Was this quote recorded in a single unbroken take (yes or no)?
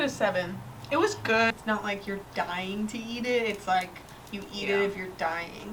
no